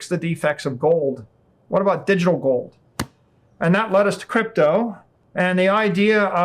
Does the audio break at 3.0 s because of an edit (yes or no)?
no